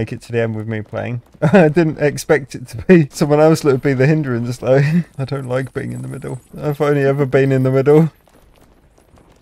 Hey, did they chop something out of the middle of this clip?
no; 0 cuts

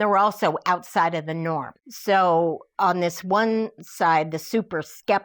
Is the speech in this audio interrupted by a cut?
no; 0 cuts

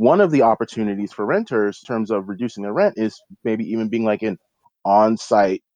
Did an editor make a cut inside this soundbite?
yes; 1 cut; at 1.8 s

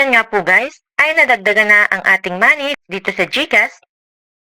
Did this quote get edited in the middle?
yes; 1 cut; at 2.8 s

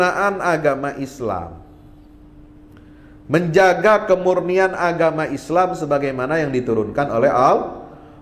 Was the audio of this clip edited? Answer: no; 0 cuts

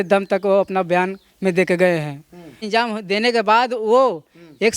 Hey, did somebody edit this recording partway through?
yes; 1 cut; at 2.6 s

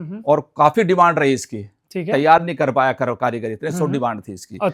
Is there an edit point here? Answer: no; 0 cuts

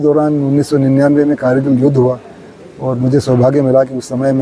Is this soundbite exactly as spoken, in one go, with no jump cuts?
yes; 0 cuts

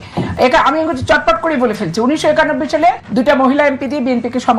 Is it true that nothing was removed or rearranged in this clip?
no; 1 cut; at 3.0 s

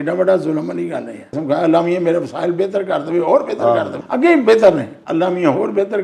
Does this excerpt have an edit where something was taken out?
yes; 3 cuts; at 1.3 s, 4.0 s, 5.0 s

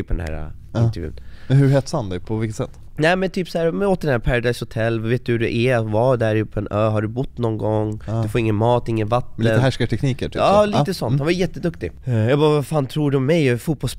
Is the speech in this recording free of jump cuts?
no; 1 cut; at 11.9 s

